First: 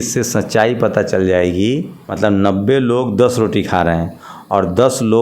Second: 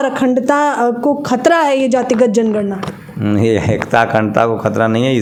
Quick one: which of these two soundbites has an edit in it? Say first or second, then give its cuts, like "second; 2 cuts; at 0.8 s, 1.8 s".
first; 1 cut; at 2.0 s